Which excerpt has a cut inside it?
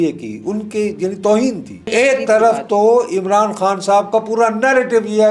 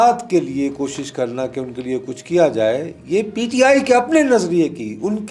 first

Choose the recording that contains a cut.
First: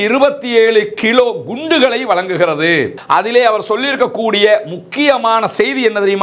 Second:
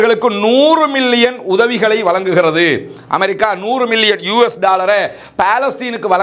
first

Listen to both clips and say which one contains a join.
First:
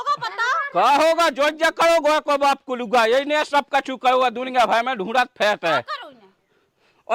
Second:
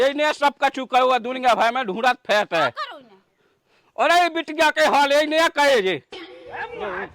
second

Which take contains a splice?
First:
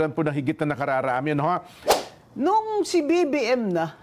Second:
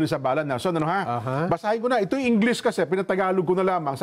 first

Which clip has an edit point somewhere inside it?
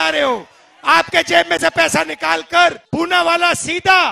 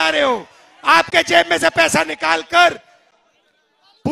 first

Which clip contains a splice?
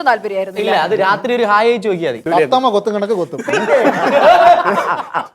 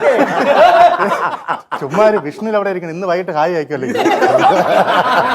first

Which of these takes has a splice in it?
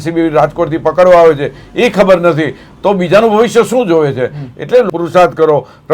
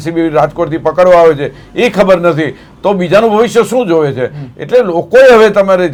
first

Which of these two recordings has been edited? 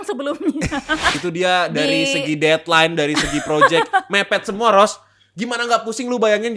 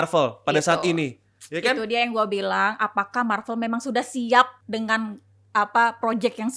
first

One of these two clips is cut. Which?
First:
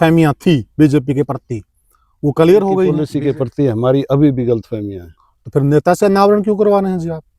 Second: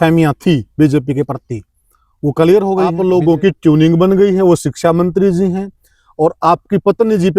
second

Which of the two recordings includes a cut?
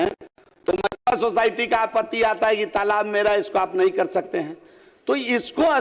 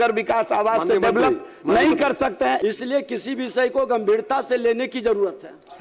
second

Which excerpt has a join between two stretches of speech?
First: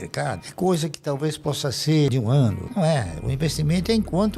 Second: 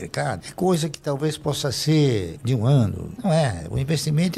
first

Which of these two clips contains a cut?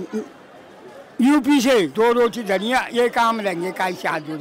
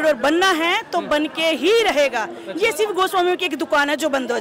first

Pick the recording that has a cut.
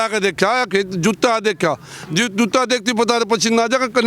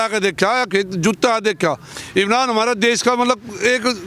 second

